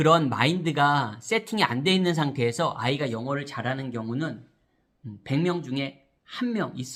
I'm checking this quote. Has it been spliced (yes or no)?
no